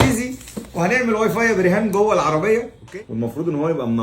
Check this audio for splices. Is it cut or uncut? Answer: cut